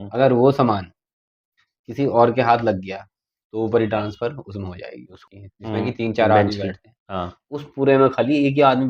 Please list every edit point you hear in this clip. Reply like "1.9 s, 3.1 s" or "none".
5.1 s